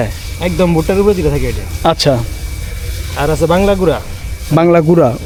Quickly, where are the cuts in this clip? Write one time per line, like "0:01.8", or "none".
none